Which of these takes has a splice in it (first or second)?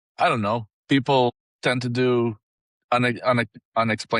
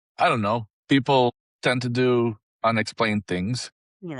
second